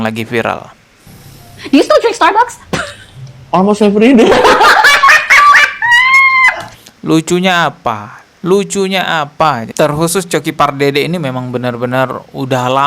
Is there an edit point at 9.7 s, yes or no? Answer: yes